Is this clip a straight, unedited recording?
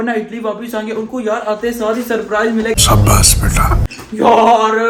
yes; 0 cuts

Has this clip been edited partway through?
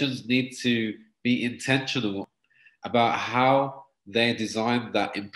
yes; 1 cut; at 2.4 s

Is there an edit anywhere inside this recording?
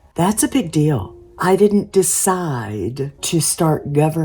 yes; 2 cuts; at 1.4 s, 3.2 s

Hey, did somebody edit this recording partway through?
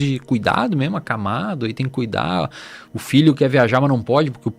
no; 0 cuts

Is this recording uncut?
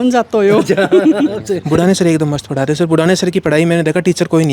no; 1 cut; at 1.6 s

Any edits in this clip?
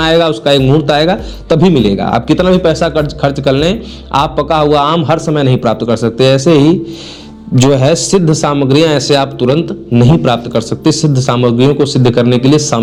no; 0 cuts

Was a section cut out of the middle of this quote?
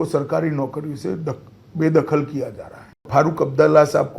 yes; 1 cut; at 3.0 s

